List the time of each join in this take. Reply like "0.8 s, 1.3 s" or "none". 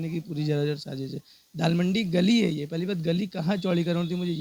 none